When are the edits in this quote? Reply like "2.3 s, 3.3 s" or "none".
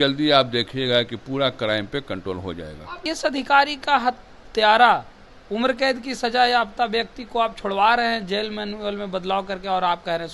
3.1 s